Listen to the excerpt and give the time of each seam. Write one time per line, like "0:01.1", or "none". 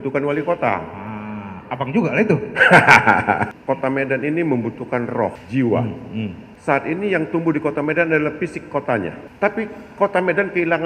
0:03.5
0:05.4
0:06.5
0:09.2